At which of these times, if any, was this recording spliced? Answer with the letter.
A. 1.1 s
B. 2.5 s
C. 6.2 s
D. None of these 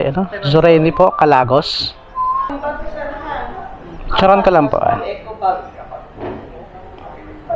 B